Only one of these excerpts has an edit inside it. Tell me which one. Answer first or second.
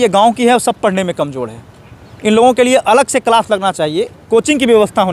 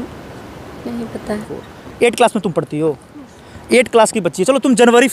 second